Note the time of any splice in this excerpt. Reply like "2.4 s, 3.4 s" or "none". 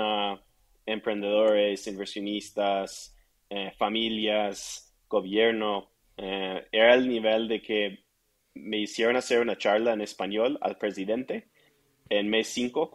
none